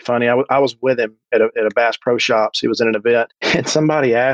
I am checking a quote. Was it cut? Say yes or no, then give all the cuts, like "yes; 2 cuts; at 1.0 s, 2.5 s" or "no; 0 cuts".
yes; 1 cut; at 3.4 s